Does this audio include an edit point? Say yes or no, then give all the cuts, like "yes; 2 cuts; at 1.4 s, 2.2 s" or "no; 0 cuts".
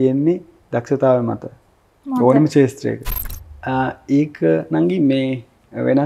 yes; 1 cut; at 3.1 s